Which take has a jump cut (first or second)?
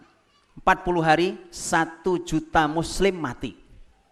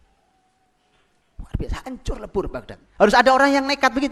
second